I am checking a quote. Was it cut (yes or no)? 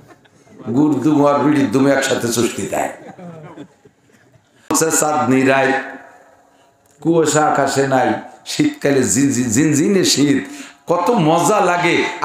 yes